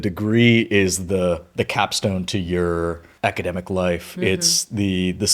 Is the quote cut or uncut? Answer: cut